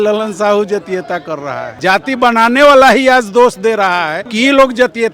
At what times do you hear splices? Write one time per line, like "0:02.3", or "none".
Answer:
0:01.6
0:04.2